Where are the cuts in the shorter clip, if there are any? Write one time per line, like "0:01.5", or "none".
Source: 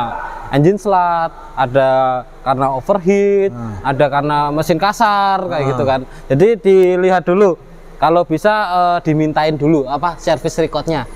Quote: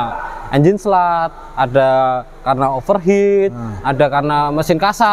none